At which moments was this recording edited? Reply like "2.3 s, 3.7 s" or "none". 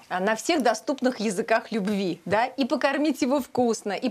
none